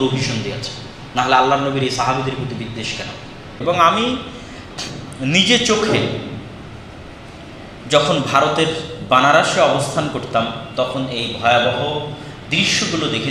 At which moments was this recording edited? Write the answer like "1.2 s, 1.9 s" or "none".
3.6 s